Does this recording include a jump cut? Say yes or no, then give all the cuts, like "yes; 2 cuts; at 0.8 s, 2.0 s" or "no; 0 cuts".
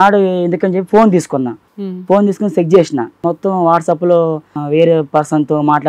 yes; 3 cuts; at 1.6 s, 3.2 s, 4.5 s